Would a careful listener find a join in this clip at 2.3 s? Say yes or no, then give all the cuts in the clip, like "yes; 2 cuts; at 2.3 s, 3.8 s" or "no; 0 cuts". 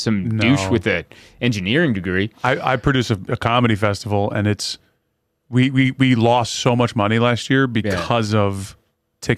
no; 0 cuts